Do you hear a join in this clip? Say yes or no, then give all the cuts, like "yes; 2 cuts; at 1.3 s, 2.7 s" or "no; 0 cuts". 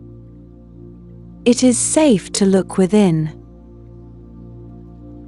yes; 2 cuts; at 1.4 s, 4.0 s